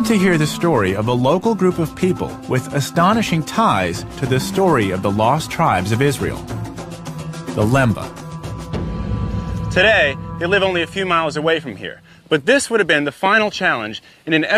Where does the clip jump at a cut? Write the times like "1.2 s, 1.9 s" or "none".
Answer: none